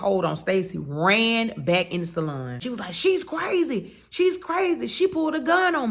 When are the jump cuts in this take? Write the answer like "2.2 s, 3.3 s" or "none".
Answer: 2.6 s